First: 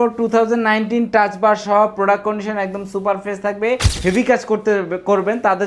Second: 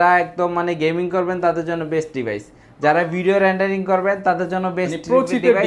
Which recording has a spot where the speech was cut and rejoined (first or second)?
first